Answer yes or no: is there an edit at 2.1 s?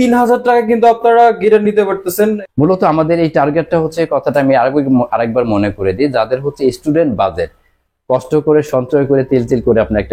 yes